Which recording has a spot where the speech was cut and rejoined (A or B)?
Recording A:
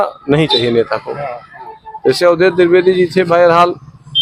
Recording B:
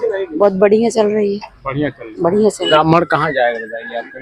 B